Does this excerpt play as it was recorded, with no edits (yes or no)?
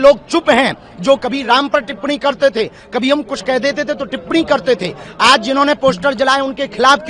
yes